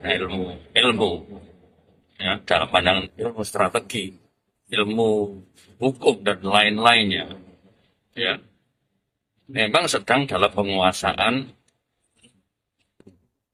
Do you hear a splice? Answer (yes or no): no